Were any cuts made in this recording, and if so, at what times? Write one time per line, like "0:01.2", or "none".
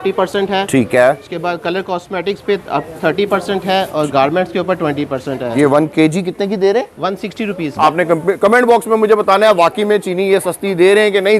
0:05.5
0:07.7